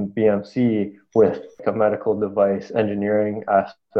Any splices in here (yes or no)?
yes